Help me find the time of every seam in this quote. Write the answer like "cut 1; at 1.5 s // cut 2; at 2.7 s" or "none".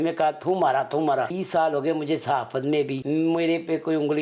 cut 1; at 1.4 s // cut 2; at 3.0 s

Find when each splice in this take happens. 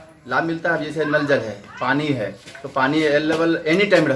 none

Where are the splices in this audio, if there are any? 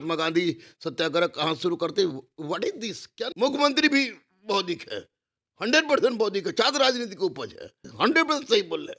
cut 1; at 3.3 s // cut 2; at 7.8 s

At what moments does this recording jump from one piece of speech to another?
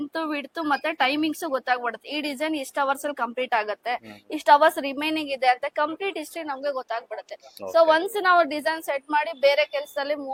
none

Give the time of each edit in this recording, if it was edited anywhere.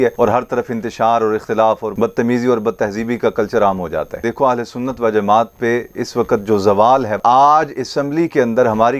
cut 1; at 4.1 s // cut 2; at 7.2 s

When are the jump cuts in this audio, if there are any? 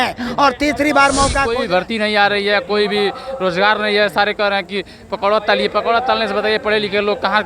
cut 1; at 1.4 s

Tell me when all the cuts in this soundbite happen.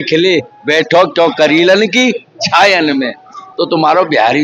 cut 1; at 3.4 s

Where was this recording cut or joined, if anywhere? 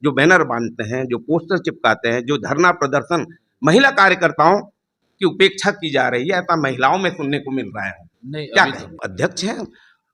cut 1; at 8.9 s

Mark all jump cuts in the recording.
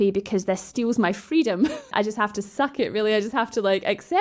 cut 1; at 1.9 s

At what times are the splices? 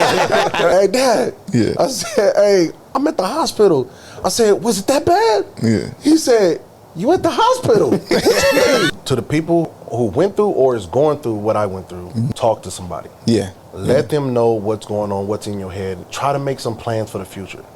cut 1; at 0.7 s // cut 2; at 8.9 s // cut 3; at 9.7 s // cut 4; at 12.3 s // cut 5; at 16.1 s

